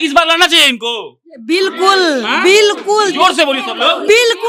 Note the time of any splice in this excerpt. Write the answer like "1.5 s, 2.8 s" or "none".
none